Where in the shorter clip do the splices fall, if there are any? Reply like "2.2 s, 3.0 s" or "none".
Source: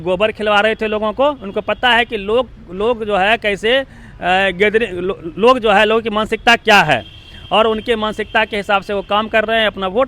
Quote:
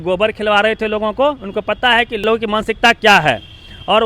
2.2 s